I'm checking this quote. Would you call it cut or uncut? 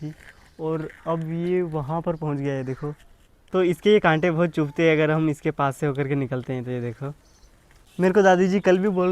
cut